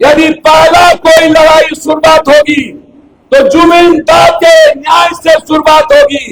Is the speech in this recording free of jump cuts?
yes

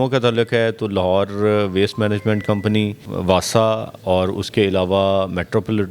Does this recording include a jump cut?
yes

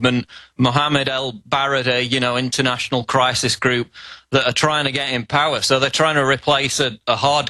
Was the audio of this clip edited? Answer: no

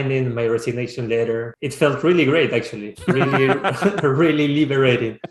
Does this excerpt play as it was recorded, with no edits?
no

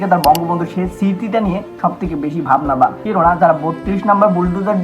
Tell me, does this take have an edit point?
yes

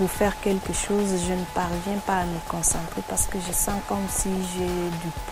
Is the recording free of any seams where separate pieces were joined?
yes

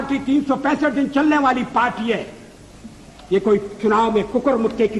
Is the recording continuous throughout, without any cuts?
yes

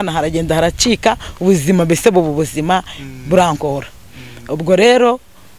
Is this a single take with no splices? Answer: yes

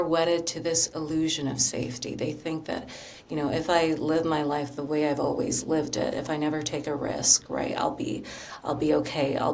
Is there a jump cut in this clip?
no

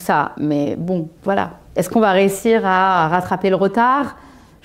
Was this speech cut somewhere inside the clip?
yes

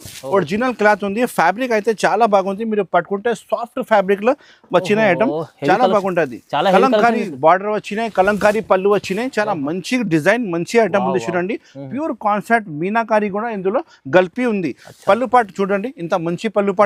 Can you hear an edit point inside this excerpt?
no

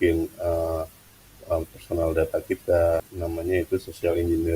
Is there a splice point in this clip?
yes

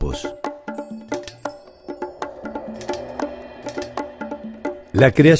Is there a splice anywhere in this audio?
no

